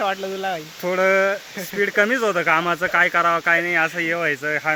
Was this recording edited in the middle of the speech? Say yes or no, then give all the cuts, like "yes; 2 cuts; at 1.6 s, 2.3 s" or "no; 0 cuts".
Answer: no; 0 cuts